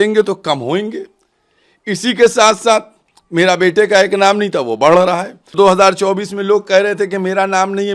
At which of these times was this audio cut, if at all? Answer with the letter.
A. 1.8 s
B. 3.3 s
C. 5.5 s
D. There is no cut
C